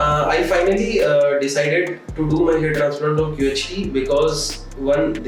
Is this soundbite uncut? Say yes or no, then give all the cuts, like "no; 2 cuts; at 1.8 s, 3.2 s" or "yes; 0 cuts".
yes; 0 cuts